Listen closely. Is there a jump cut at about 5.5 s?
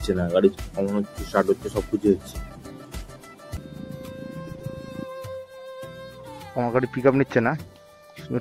no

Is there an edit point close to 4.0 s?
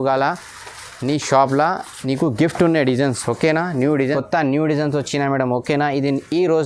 yes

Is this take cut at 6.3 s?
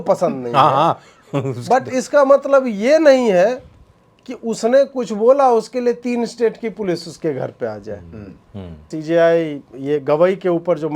no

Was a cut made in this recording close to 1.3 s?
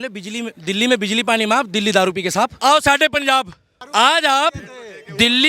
no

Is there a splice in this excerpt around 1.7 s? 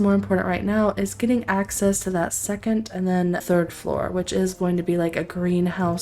no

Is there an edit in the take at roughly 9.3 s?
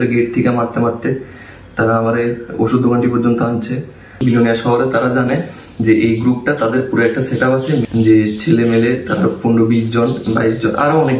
no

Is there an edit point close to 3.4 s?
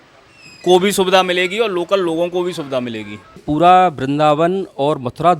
yes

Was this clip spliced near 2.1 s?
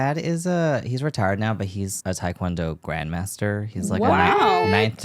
no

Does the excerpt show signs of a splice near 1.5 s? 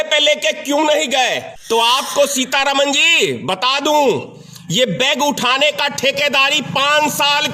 yes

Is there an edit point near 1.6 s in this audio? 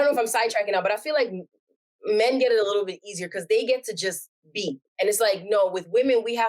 no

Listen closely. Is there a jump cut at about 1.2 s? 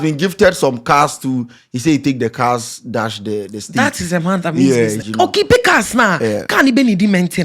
no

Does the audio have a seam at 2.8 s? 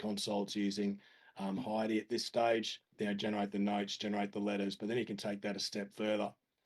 yes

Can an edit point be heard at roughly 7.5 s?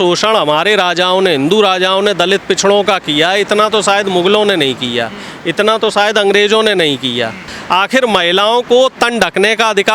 yes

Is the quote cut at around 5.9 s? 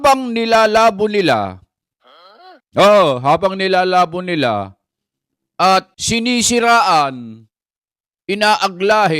yes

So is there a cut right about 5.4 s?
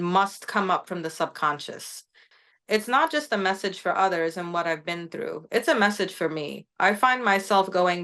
no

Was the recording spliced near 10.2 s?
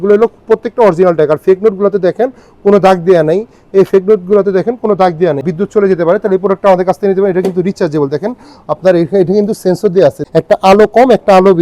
yes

